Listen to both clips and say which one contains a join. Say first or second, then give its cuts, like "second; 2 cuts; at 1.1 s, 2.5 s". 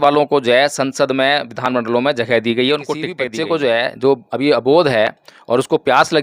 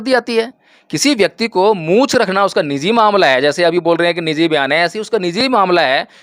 first; 1 cut; at 3.2 s